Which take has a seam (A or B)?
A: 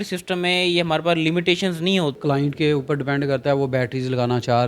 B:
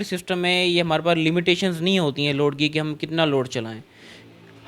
A